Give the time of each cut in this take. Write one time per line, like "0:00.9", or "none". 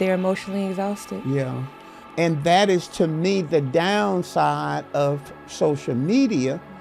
0:02.1